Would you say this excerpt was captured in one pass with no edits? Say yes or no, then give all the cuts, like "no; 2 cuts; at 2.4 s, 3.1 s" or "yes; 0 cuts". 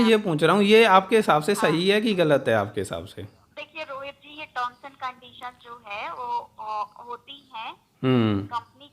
yes; 0 cuts